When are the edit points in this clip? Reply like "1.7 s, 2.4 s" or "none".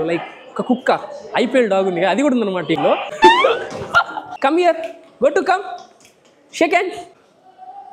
3.1 s

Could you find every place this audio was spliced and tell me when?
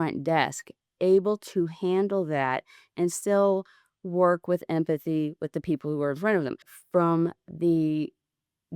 6.7 s

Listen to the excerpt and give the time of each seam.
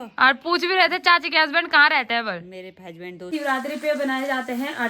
3.3 s

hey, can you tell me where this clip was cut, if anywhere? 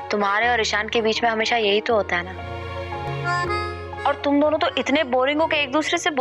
none

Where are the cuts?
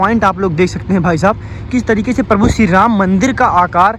none

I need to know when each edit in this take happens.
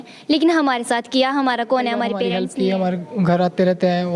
2.3 s

